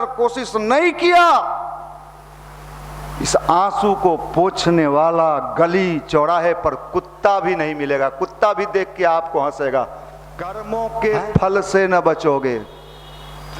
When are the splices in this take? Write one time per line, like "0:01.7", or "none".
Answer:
0:10.6